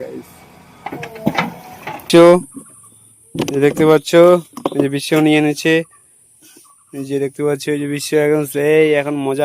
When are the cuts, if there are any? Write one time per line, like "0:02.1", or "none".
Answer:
0:02.0

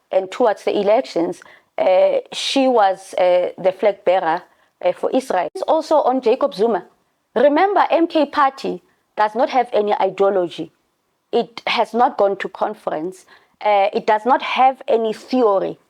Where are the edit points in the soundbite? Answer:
0:05.6

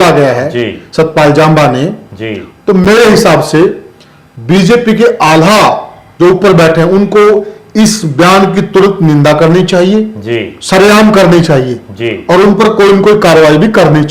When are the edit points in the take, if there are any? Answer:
none

